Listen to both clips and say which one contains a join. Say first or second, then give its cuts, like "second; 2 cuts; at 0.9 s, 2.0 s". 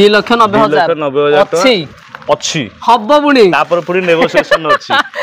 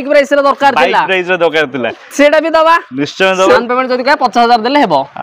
second; 1 cut; at 3.6 s